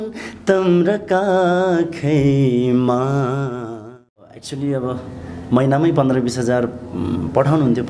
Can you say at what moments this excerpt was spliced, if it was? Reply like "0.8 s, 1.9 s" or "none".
4.5 s